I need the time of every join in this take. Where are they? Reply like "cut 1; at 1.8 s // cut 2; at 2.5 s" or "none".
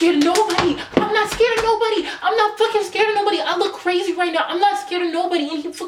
none